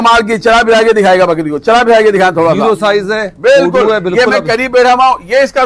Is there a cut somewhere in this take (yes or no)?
no